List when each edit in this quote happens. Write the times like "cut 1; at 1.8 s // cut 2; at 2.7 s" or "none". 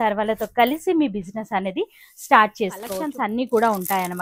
cut 1; at 3.0 s